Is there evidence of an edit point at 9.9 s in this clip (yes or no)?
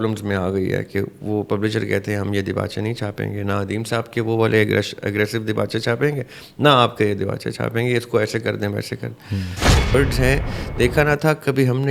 yes